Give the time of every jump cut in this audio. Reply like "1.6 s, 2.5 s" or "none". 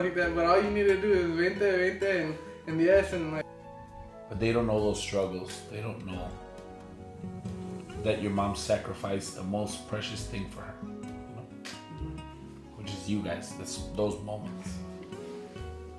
3.5 s